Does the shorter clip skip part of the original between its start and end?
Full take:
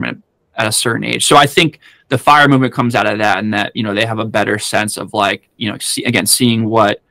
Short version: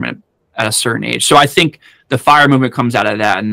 no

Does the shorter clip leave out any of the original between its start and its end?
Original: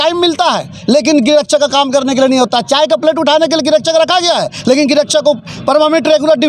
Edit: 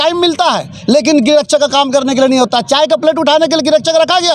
no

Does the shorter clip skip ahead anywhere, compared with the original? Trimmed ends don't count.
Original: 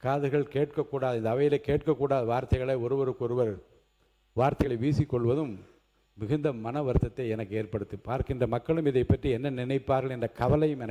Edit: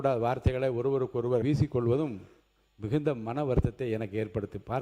yes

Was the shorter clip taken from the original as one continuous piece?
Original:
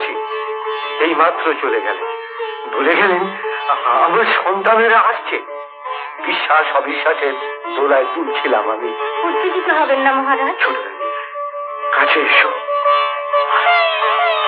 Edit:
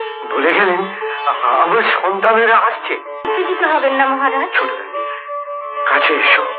no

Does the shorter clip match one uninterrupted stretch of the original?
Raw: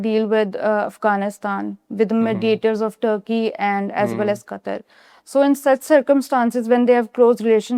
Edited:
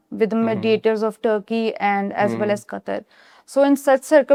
yes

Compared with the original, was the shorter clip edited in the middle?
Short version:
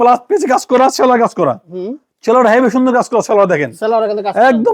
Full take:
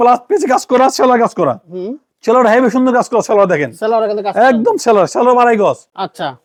no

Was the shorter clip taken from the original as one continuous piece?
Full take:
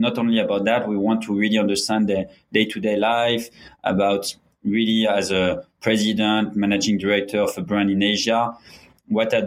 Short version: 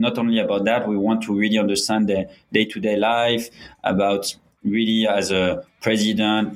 yes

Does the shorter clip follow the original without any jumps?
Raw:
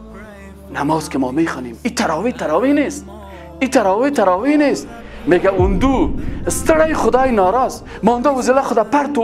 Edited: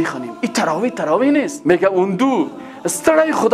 no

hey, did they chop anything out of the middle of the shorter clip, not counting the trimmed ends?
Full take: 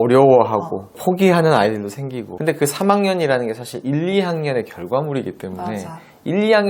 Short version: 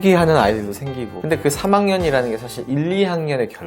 no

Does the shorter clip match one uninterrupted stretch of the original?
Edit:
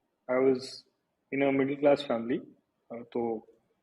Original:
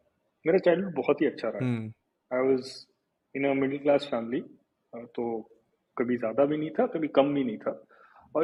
yes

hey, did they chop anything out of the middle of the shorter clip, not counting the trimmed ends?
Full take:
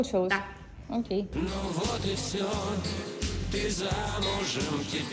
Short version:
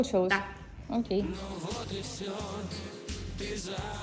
yes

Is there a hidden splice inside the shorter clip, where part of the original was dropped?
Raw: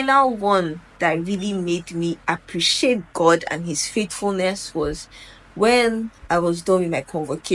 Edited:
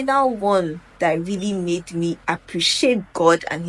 no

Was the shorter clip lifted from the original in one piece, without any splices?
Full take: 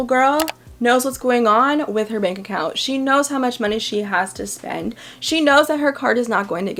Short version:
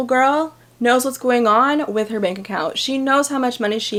yes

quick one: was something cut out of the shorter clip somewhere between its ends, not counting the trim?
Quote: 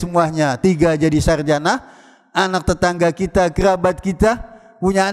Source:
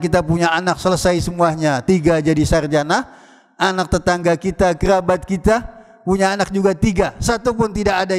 no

